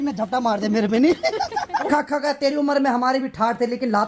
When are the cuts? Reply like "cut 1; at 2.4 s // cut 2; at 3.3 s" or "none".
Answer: cut 1; at 1.9 s